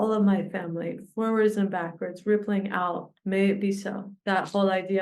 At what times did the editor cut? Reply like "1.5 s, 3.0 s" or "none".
3.1 s, 4.1 s

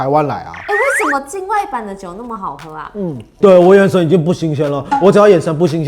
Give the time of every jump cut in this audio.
3.3 s

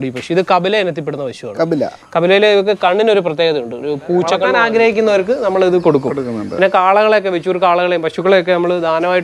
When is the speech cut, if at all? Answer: 4.6 s

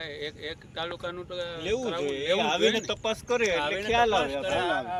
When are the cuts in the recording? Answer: none

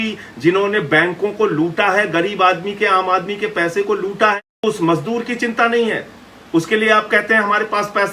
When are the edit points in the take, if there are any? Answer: 4.6 s

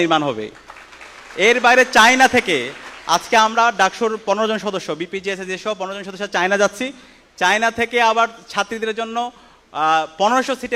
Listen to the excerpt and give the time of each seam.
none

